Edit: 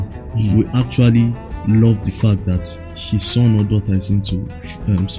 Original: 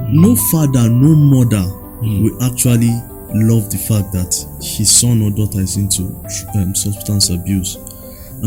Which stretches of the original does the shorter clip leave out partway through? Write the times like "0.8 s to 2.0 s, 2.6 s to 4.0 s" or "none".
none